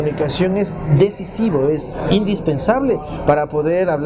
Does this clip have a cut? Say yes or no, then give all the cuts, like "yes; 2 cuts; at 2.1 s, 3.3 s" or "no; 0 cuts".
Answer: no; 0 cuts